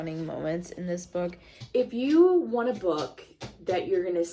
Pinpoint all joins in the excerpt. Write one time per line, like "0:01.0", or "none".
0:01.5

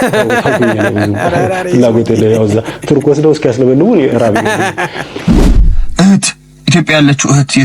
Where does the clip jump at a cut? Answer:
0:05.3

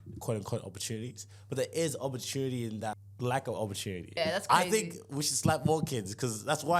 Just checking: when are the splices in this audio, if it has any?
0:03.1
0:04.2

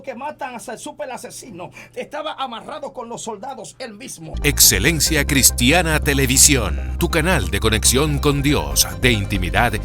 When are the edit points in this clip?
0:04.3

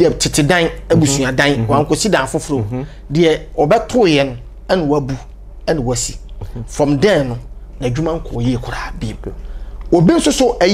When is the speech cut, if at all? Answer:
none

